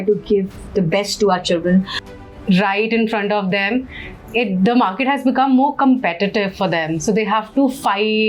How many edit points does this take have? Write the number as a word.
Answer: one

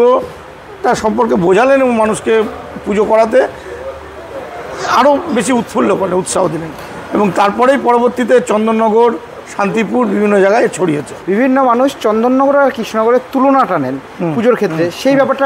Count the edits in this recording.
one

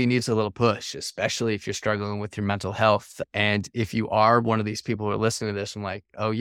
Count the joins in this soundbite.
one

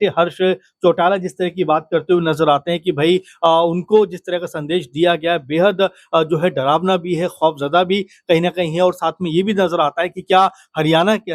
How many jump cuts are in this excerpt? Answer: zero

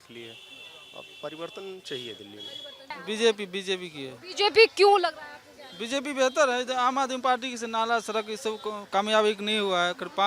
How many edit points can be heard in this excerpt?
one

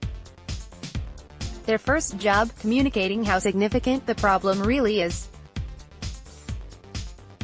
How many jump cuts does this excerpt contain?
two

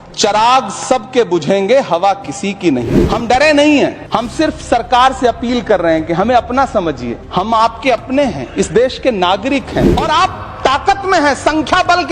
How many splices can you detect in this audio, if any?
four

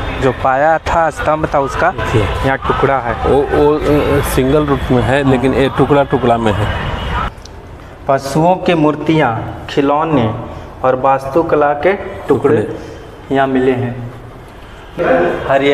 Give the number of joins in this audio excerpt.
two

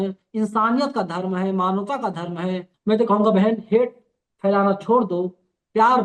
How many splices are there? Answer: one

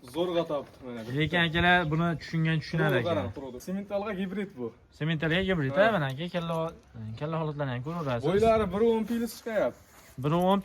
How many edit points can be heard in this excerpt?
one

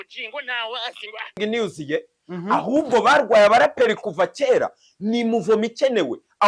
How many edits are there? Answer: one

